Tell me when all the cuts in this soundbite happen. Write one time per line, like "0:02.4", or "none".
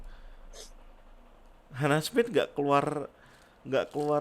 none